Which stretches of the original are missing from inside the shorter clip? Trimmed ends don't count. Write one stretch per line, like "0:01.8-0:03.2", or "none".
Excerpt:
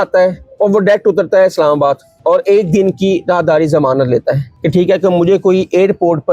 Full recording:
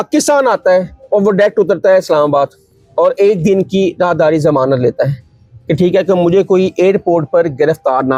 0:02.6-0:02.8
0:05.2-0:05.6

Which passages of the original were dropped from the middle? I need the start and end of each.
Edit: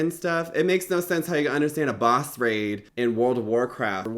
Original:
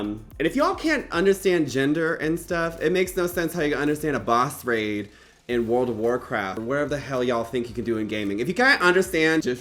0:05.1-0:05.4

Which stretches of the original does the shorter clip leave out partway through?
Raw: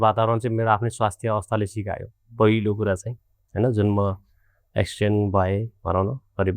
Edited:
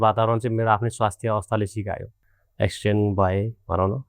0:02.2-0:04.3

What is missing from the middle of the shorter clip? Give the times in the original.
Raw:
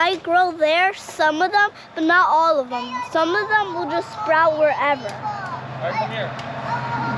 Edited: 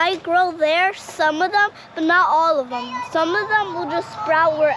none

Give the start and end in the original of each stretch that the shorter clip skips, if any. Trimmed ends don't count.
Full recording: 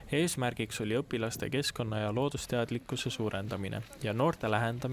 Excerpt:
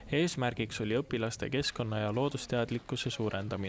none

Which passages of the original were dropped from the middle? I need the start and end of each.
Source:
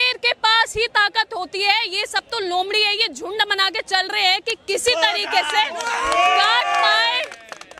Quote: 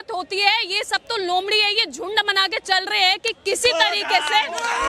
none

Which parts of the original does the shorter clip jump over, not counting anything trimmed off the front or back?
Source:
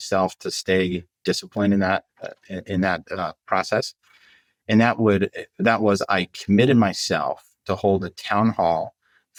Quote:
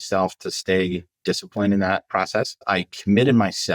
0:02.6-0:06.0

